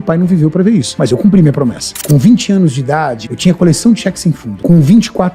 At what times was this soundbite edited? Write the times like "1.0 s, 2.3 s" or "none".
0.9 s, 1.9 s, 3.2 s, 4.5 s

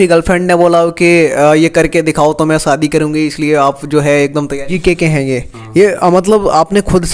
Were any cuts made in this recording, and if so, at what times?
4.7 s

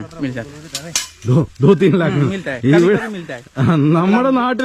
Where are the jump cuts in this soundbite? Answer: none

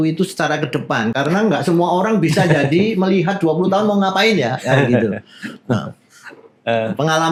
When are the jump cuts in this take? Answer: none

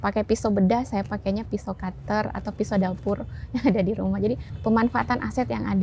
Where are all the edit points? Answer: 4.5 s

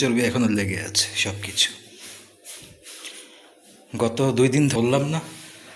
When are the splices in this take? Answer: 4.7 s

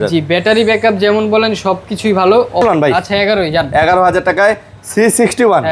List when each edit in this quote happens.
2.6 s

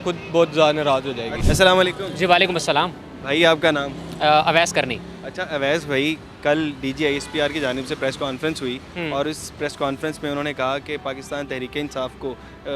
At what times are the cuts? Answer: none

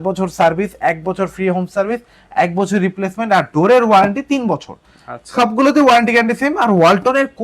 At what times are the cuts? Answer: none

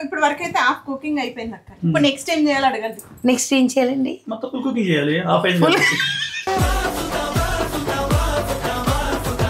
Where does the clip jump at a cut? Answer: none

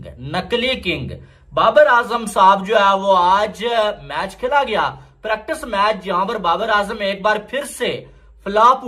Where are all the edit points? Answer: none

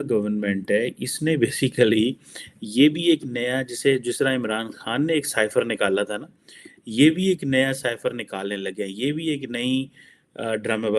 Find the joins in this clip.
none

